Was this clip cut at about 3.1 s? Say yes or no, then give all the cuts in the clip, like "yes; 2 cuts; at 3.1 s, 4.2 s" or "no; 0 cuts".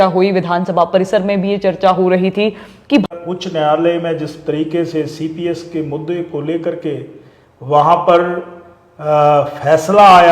yes; 1 cut; at 3.1 s